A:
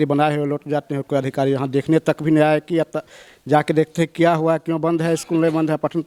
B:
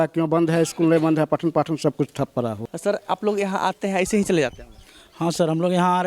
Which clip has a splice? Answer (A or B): B